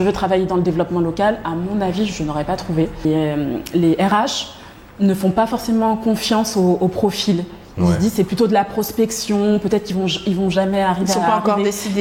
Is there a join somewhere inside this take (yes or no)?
yes